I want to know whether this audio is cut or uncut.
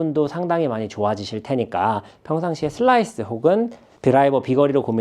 cut